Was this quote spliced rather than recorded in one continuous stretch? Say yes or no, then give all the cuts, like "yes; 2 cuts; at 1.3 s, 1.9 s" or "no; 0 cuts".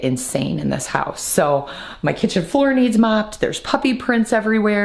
no; 0 cuts